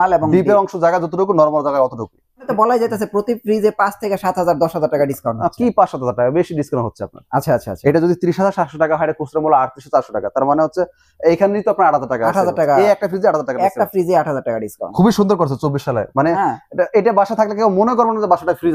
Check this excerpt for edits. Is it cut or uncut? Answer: cut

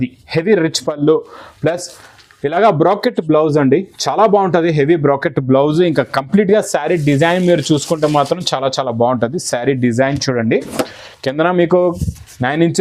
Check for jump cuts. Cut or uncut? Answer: uncut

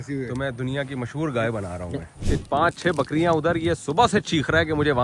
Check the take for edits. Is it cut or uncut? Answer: cut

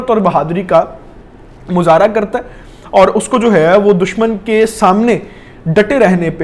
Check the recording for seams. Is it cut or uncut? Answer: uncut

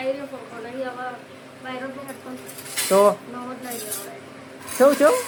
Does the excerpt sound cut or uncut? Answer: uncut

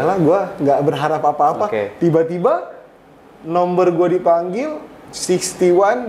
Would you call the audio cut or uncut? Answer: uncut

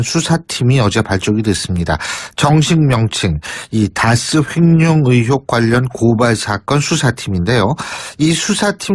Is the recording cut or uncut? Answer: uncut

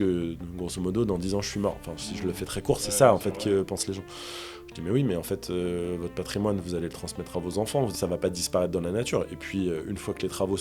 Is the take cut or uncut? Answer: cut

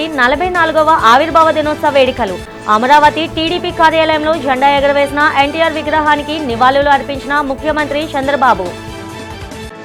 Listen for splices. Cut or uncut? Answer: uncut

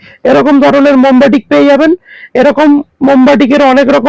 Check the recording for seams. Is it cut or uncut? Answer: uncut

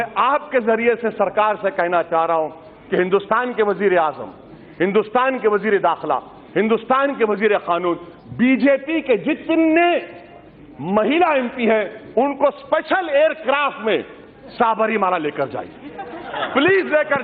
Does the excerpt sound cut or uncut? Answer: uncut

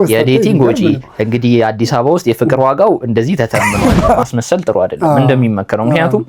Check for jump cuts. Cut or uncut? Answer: cut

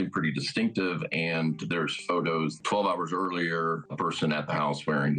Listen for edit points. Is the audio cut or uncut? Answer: cut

